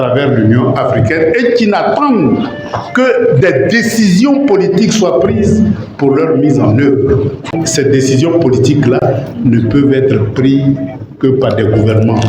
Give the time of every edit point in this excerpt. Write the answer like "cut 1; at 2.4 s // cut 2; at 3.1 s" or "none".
cut 1; at 7.6 s